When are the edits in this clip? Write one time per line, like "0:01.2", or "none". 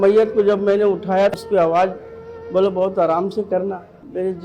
0:01.4

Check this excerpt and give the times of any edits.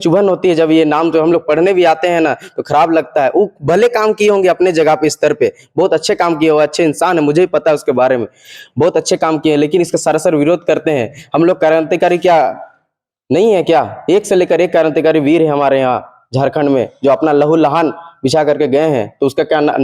none

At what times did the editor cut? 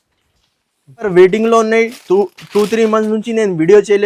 0:01.1

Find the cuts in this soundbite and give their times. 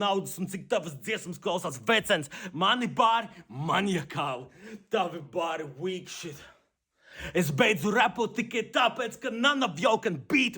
0:02.3
0:06.8

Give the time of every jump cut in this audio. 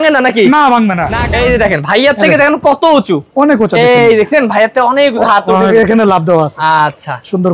0:01.1
0:05.7

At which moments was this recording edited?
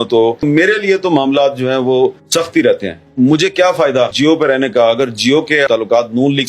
0:02.2
0:04.1
0:05.7

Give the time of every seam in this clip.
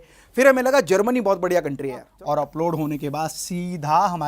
0:02.1

